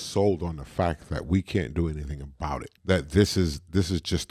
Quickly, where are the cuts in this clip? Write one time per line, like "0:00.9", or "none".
0:02.7